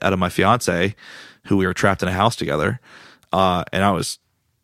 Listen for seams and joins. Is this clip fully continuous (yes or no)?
yes